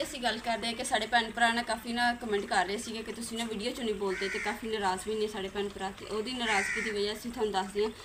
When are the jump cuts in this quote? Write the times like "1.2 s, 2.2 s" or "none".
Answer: none